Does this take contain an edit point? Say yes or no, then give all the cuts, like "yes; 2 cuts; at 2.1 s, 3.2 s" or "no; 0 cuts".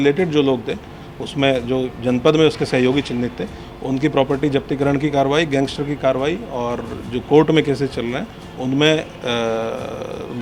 no; 0 cuts